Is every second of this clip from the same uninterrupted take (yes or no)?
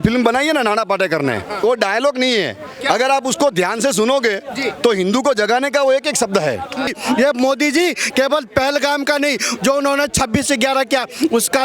no